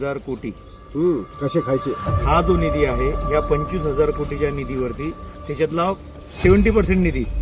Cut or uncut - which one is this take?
uncut